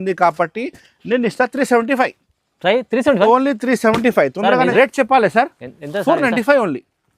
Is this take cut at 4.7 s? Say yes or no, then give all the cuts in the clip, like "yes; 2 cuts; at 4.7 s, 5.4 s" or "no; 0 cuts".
yes; 1 cut; at 4.7 s